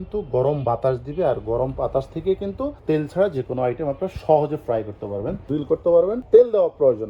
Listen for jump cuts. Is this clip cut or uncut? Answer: cut